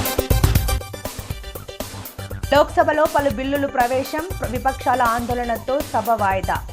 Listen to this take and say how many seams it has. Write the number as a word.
zero